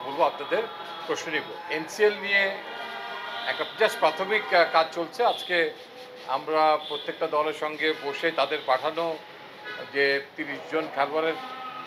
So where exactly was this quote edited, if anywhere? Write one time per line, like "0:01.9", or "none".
0:01.6